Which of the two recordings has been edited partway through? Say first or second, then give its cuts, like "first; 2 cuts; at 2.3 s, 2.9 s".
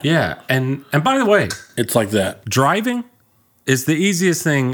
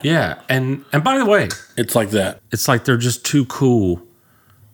second; 1 cut; at 2.4 s